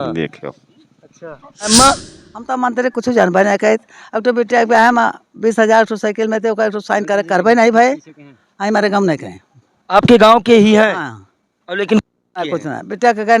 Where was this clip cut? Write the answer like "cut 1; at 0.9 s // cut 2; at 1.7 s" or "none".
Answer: cut 1; at 1.7 s